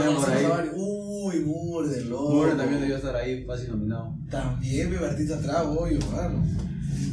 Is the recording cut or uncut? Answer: uncut